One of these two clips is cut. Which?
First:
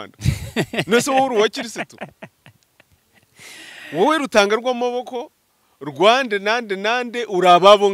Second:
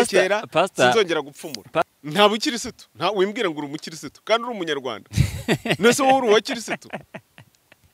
second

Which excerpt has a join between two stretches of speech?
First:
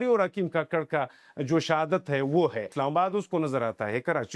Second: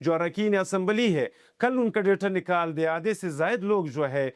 first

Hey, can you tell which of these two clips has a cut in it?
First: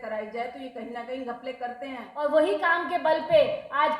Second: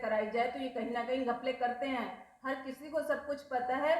first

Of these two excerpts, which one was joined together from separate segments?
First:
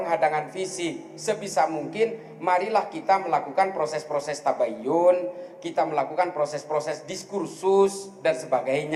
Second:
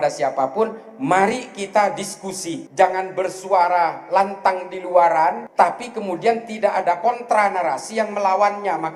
second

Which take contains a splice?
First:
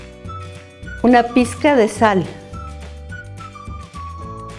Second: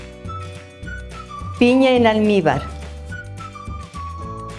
second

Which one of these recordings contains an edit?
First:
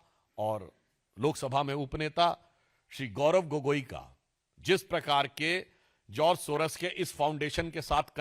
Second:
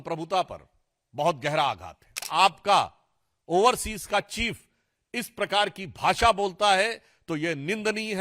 second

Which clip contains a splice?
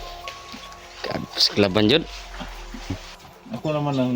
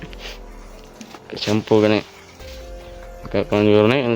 first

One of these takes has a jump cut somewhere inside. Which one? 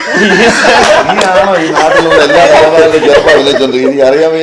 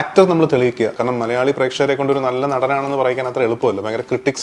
second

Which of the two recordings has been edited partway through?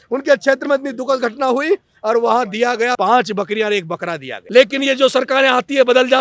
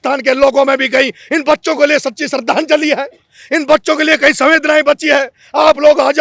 first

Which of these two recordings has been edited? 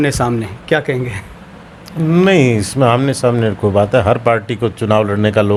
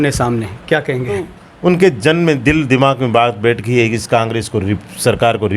second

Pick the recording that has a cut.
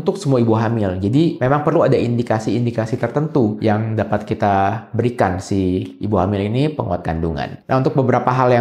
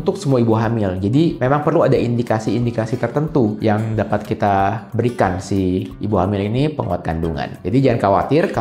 first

